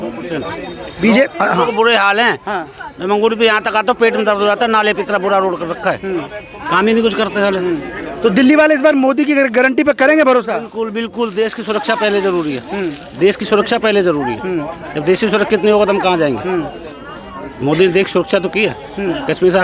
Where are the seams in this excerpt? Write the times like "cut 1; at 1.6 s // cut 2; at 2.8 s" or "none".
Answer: none